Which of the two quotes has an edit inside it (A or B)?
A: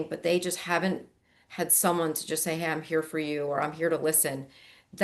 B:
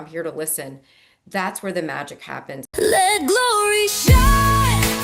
B